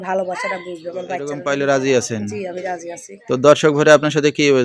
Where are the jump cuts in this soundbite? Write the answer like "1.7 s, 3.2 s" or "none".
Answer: 1.3 s